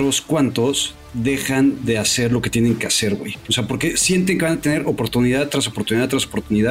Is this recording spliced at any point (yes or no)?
no